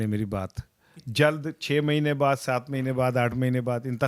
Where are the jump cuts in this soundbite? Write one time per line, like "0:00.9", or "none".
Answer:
none